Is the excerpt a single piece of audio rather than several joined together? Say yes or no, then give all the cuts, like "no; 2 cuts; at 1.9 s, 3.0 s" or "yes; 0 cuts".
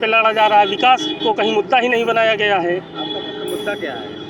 yes; 0 cuts